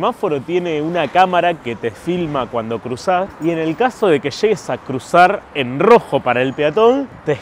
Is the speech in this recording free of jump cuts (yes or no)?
yes